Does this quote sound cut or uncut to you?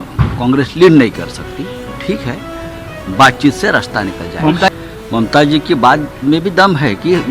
cut